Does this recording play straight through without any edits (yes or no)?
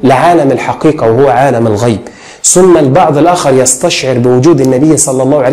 yes